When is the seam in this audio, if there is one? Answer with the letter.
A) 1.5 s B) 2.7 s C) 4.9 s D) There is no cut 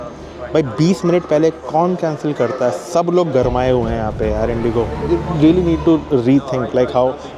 C